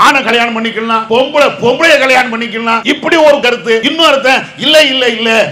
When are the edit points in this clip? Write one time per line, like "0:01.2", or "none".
0:01.0
0:02.8
0:03.9